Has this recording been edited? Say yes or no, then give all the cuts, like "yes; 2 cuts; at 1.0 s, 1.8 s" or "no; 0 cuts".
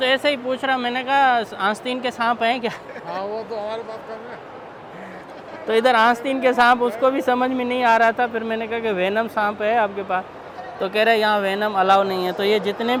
no; 0 cuts